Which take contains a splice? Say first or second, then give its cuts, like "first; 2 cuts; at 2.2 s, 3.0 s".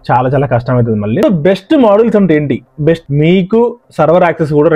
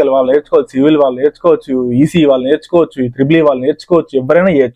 first; 2 cuts; at 1.2 s, 3.0 s